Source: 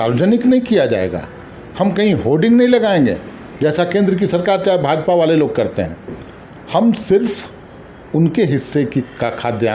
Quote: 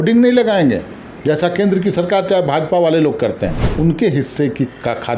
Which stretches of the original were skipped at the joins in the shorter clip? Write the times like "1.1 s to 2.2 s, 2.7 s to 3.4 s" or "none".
6.0 s to 8.0 s